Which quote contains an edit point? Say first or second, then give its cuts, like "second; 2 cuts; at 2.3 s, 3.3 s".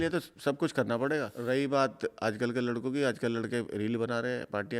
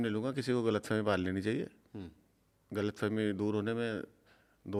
first; 1 cut; at 1.3 s